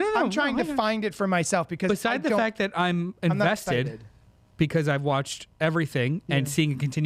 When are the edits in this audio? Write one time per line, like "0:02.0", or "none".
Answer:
none